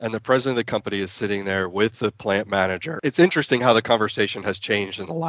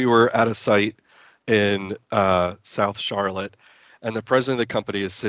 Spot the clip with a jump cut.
first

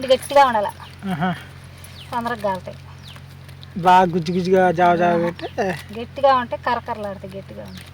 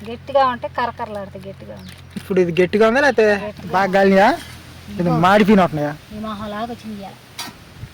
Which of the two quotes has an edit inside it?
second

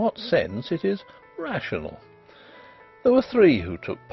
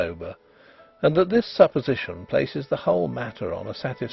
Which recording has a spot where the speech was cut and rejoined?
second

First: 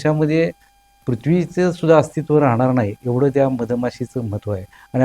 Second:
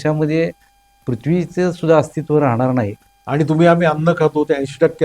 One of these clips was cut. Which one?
second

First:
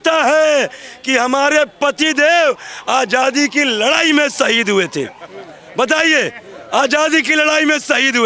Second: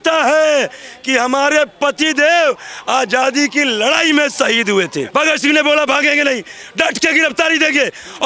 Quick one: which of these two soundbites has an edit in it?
second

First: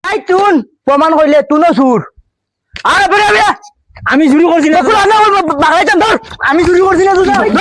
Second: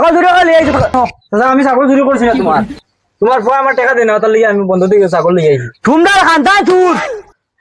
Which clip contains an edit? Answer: second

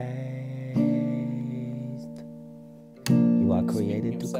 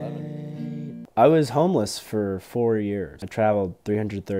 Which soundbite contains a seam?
second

